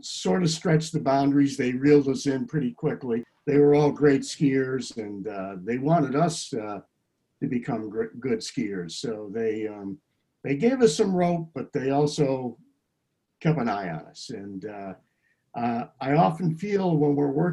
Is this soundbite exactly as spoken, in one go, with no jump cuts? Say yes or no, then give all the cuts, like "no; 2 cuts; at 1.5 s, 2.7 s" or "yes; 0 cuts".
no; 1 cut; at 3.3 s